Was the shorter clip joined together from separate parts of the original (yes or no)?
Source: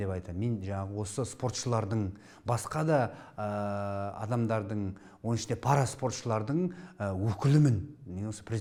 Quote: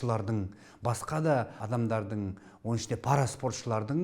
yes